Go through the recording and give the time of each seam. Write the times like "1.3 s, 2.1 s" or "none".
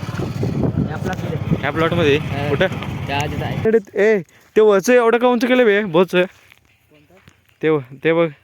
3.6 s